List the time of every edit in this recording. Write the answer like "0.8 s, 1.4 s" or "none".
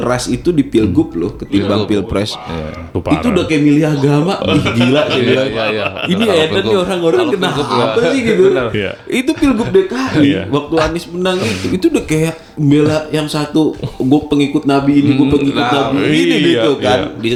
none